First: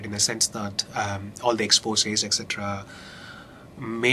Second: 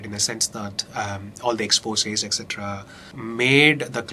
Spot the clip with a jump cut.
second; 1 cut; at 3.0 s

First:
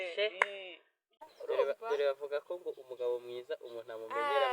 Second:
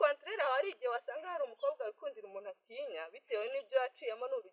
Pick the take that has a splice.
first; 1 cut; at 1.2 s

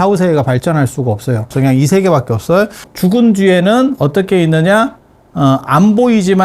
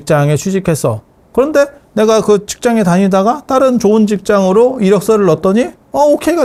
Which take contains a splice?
first; 2 cuts; at 1.5 s, 2.8 s

